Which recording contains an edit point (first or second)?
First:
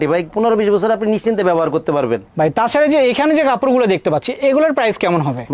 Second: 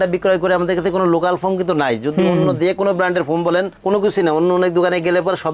first